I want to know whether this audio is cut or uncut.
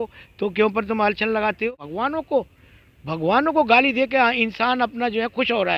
cut